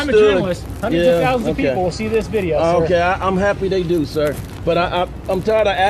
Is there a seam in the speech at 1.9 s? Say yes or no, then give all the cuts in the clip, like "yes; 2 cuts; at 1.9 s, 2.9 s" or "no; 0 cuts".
no; 0 cuts